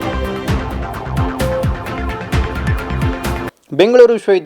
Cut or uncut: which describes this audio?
cut